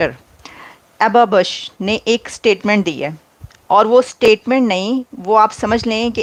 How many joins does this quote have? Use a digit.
0